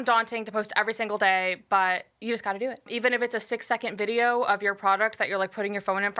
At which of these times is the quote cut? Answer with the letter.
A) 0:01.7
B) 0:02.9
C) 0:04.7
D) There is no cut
B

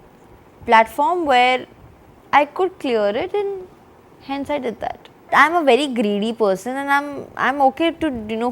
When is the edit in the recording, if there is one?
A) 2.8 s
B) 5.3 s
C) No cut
B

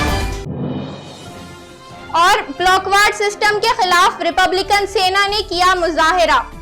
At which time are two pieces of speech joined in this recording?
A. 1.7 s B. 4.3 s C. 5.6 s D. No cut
A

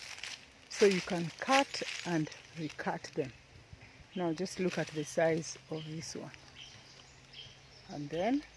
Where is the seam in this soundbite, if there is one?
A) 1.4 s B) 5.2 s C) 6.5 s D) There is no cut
D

